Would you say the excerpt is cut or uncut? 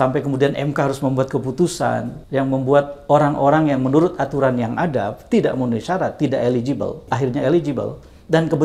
cut